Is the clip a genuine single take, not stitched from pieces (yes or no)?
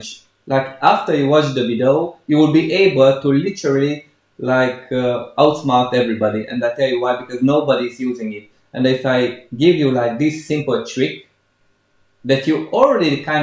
yes